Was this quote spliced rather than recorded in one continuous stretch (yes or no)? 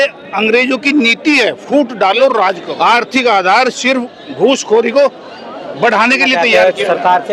yes